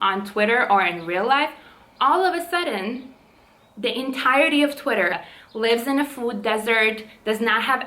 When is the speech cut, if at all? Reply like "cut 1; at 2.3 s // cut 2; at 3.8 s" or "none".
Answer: cut 1; at 5.2 s